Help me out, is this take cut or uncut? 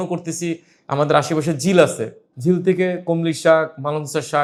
uncut